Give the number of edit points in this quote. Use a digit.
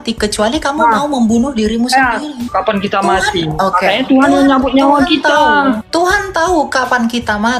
2